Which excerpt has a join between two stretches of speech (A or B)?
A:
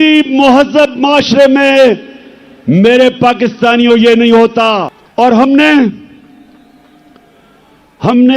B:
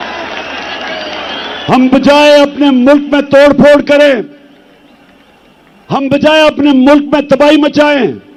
A